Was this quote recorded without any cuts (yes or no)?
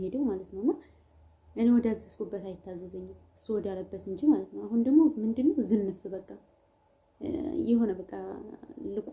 yes